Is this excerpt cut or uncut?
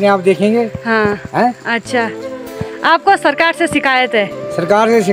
uncut